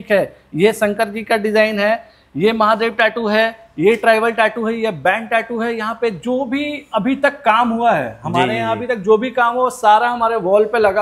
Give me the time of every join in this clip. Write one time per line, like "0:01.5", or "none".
none